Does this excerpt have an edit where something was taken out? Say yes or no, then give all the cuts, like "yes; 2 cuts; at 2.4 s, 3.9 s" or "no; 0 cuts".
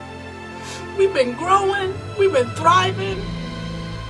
yes; 1 cut; at 1.0 s